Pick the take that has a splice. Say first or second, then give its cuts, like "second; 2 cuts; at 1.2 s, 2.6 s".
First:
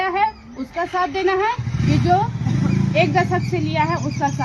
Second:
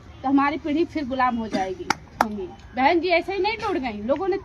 second; 1 cut; at 2.4 s